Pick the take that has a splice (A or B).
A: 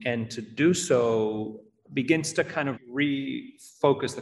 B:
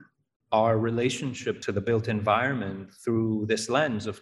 B